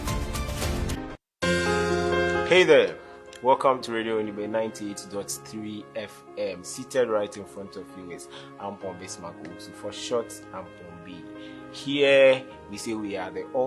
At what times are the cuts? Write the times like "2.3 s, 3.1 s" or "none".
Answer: 1.0 s